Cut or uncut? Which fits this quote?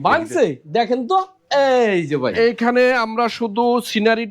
cut